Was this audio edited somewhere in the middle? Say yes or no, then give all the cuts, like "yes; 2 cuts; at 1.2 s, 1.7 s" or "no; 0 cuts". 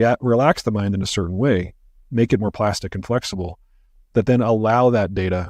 no; 0 cuts